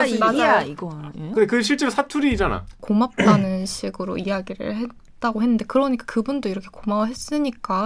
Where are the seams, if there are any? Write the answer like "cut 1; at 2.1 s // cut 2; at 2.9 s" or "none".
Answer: cut 1; at 2.7 s